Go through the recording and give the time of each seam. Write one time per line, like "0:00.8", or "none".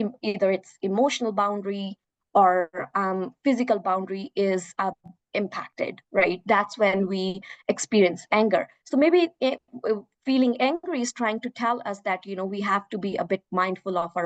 none